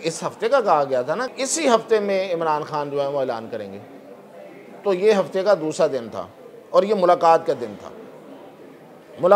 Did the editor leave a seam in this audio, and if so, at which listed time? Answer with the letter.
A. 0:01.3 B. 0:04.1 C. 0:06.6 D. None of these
A